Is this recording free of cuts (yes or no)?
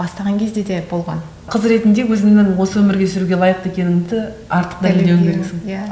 no